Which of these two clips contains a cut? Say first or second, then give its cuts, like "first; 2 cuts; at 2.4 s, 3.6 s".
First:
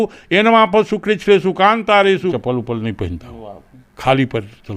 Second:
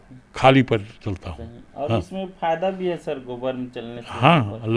first; 1 cut; at 2.3 s